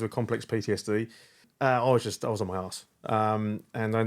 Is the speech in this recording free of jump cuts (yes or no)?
no